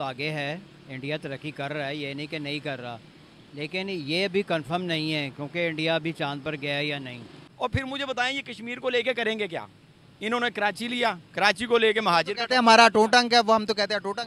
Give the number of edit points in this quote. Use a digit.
1